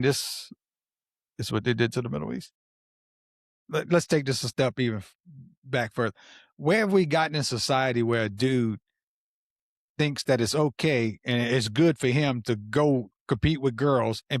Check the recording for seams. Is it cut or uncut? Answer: cut